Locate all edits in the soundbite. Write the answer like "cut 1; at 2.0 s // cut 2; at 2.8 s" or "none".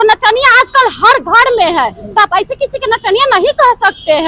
none